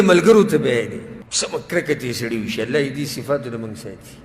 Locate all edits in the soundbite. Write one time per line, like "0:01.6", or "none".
0:01.2